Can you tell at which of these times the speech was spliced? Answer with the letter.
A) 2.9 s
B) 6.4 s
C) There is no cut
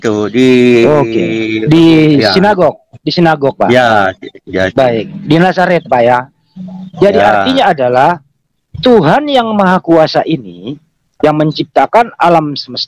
C